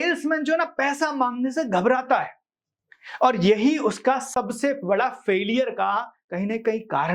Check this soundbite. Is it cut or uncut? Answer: uncut